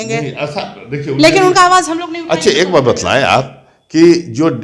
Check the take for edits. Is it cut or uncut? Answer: uncut